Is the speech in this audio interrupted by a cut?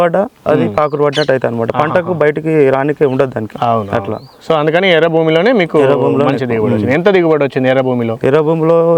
no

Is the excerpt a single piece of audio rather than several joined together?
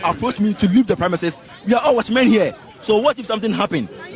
yes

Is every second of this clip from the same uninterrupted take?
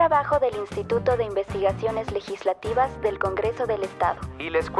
yes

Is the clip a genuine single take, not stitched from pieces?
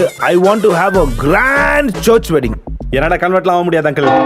yes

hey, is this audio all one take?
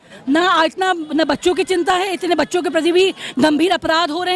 yes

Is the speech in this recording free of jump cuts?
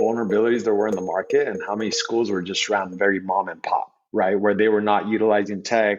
yes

